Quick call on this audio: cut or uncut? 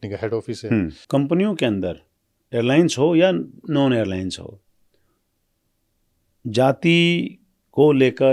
cut